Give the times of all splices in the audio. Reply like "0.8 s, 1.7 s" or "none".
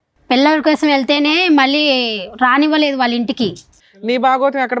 3.7 s